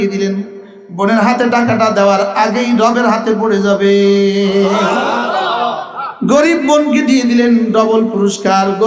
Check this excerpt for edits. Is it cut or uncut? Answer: cut